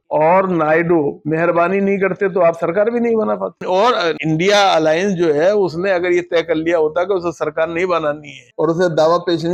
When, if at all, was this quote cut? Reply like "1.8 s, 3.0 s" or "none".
none